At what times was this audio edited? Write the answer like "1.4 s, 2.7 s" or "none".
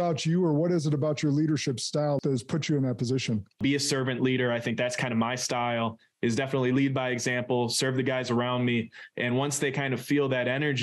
2.2 s, 3.6 s